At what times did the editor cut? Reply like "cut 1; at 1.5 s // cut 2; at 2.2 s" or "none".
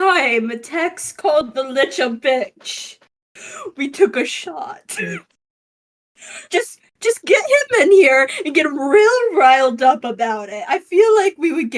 none